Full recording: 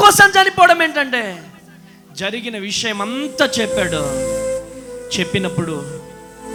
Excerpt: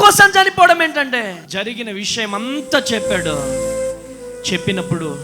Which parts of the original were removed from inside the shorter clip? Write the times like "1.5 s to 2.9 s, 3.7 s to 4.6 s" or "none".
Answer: 1.4 s to 2.1 s